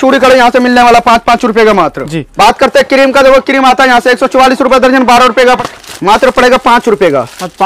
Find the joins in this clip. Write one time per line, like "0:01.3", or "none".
0:02.3
0:05.6

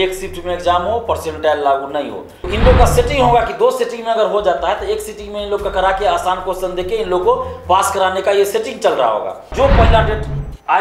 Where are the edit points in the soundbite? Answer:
0:02.5
0:09.5

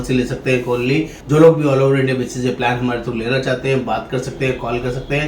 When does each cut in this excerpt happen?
0:01.2

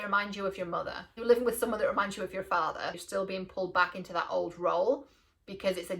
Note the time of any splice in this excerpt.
0:01.1
0:03.0

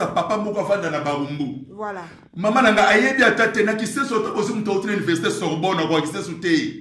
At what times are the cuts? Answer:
none

